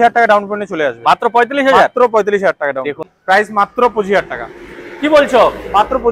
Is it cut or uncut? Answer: cut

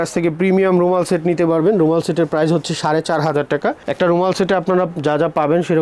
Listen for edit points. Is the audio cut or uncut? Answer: uncut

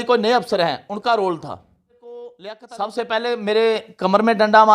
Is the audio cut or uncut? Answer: cut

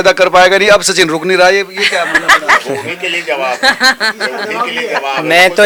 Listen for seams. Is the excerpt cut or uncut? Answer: uncut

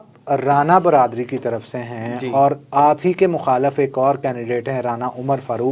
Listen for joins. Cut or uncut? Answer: uncut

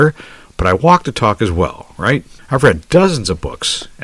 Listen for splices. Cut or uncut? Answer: cut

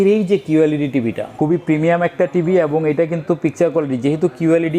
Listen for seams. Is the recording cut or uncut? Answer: cut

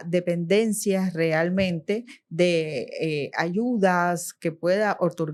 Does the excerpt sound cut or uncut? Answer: uncut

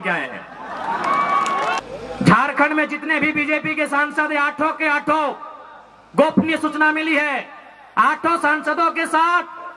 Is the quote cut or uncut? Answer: cut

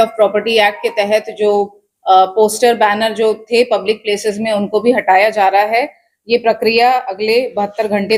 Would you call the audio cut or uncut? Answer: uncut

